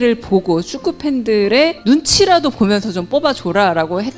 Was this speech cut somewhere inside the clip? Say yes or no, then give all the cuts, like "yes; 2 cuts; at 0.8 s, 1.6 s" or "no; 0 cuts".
no; 0 cuts